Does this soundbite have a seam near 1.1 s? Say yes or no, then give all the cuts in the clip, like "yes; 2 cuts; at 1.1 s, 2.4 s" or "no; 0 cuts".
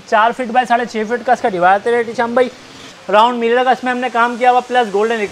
no; 1 cut; at 2.8 s